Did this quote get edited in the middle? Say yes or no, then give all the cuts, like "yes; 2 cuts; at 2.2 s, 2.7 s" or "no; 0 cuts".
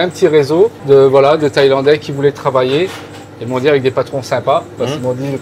no; 0 cuts